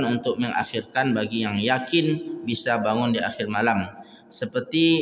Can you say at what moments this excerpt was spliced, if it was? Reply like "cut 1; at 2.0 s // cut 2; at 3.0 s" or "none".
none

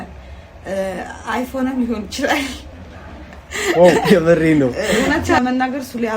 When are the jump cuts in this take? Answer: cut 1; at 4.0 s

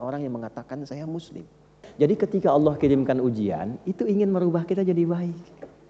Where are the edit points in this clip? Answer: cut 1; at 1.8 s

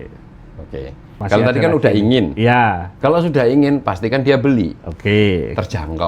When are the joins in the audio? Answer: cut 1; at 1.0 s // cut 2; at 2.9 s

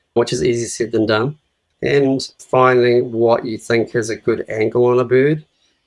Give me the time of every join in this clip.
cut 1; at 2.4 s

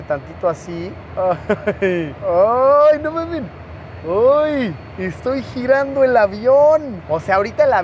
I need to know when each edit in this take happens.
cut 1; at 1.0 s // cut 2; at 7.0 s

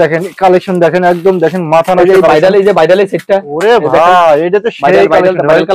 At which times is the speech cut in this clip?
none

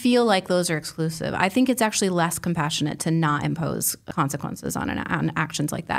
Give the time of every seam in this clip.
cut 1; at 4.0 s

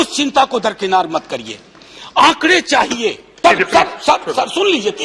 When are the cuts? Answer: cut 1; at 3.4 s

